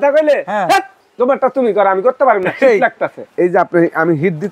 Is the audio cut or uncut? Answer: cut